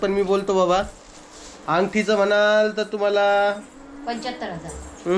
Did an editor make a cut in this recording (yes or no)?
no